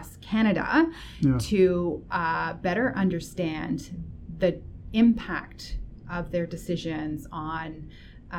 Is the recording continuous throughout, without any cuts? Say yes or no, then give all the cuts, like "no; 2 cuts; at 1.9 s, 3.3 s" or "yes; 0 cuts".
yes; 0 cuts